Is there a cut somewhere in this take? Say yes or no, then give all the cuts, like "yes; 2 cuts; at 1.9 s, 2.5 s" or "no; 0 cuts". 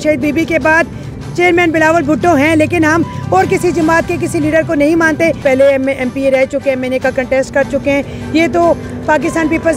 yes; 1 cut; at 5.4 s